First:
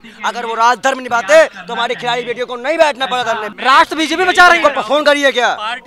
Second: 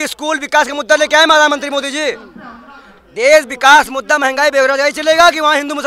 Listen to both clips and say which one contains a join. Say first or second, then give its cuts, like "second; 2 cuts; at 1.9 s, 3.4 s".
first; 1 cut; at 3.5 s